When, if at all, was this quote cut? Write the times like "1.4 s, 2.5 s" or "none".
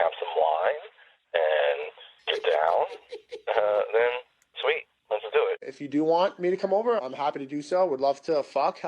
5.7 s